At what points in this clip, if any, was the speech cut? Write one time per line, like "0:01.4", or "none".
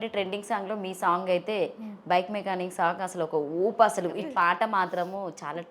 0:04.2